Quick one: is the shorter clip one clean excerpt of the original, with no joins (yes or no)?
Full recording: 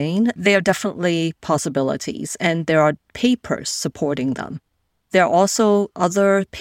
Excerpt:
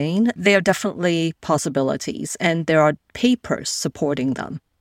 yes